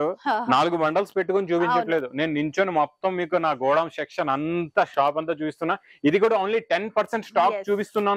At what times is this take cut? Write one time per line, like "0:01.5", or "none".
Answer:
none